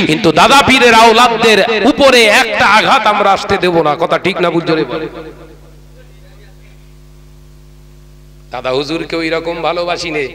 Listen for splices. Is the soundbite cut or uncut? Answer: uncut